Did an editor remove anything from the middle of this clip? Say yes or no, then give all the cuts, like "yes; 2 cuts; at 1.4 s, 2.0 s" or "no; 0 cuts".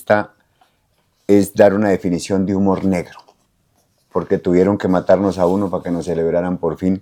no; 0 cuts